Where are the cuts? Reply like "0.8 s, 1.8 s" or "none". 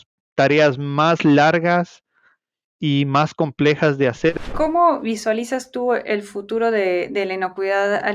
4.3 s